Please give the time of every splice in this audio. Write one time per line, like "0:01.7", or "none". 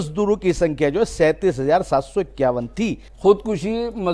0:03.1